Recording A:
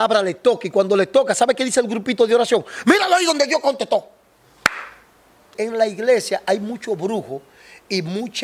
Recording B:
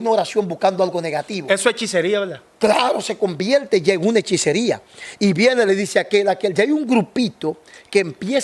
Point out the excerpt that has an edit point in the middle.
A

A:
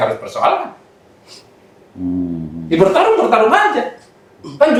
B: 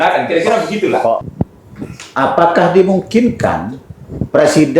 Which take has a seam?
B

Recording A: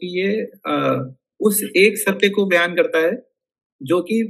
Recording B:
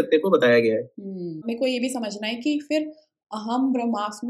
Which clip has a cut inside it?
B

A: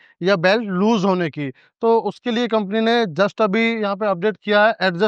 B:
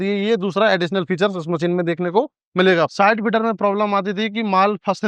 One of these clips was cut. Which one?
B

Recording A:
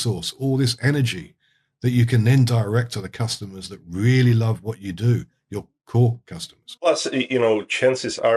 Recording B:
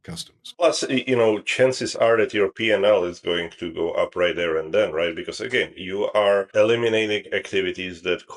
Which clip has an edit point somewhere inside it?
B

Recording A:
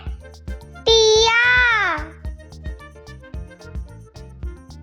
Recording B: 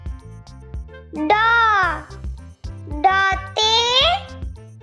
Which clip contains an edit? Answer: B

